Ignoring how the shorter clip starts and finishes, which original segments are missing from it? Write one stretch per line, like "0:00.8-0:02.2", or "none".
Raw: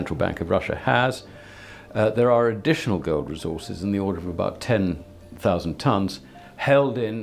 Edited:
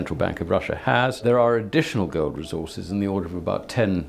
0:01.2-0:02.1

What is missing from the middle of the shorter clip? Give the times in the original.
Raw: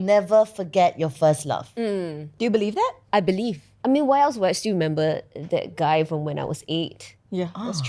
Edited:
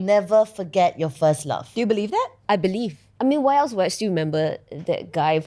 0:01.7-0:02.3

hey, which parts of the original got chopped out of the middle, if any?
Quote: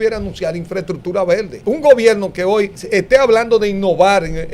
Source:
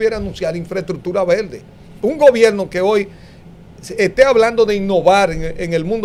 0:01.5-0:01.9
0:03.1-0:03.8

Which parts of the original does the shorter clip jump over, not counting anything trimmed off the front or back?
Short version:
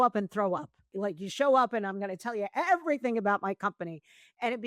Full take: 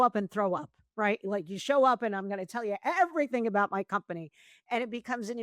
0:00.9-0:01.2

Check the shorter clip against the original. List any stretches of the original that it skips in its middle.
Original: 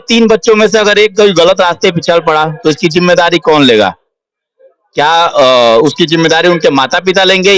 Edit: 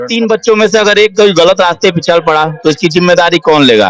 none

